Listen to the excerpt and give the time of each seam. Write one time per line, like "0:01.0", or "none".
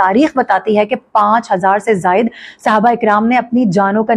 none